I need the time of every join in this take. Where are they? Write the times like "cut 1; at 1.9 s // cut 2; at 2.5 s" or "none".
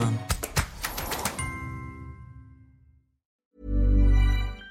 cut 1; at 3.4 s